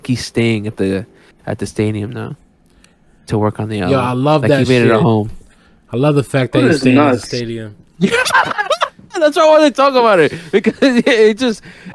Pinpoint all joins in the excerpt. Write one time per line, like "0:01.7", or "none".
none